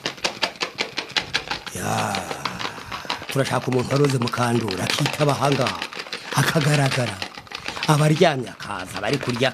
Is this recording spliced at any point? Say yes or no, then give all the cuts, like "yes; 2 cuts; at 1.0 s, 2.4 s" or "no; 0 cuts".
yes; 1 cut; at 3.2 s